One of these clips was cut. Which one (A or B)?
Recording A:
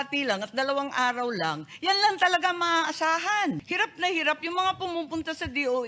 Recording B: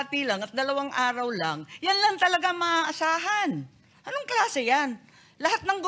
A